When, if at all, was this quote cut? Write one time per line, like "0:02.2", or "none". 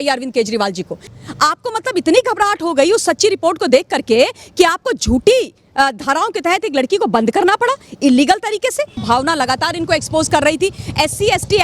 0:01.1
0:09.0